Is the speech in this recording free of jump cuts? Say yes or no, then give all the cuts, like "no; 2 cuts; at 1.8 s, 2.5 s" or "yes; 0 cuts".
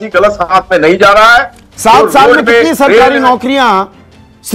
yes; 0 cuts